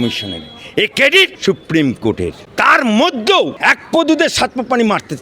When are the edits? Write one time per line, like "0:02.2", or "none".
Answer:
0:01.4
0:02.4
0:03.5